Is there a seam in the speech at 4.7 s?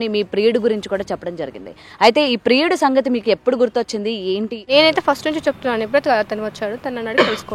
yes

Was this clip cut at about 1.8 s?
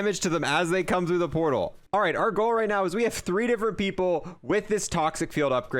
yes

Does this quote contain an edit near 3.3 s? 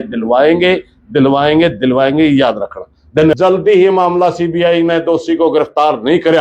yes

